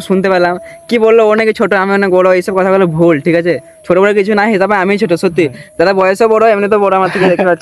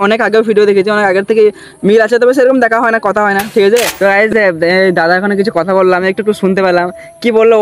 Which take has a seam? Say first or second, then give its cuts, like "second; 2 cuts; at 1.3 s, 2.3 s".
second; 1 cut; at 3.9 s